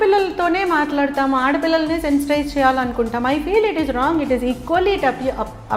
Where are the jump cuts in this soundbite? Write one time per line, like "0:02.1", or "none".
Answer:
none